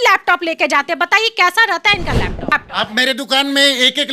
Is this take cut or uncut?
cut